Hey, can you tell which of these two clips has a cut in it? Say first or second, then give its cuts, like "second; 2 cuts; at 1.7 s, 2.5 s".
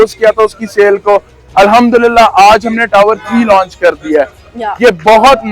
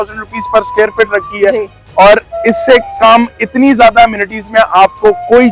first; 1 cut; at 4.4 s